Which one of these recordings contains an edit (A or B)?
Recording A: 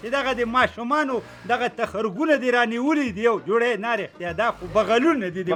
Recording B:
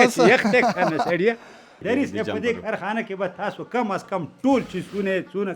B